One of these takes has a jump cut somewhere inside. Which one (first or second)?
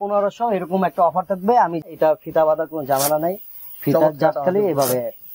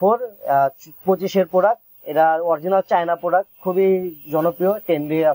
first